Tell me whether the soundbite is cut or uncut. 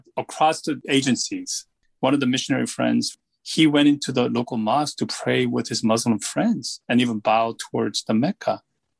cut